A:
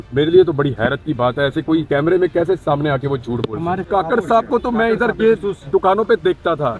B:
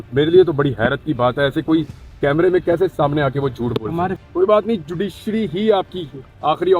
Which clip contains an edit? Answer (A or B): A